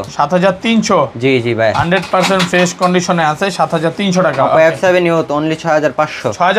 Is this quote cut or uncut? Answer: uncut